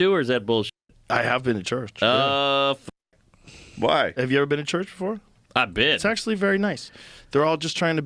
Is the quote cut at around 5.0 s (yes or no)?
no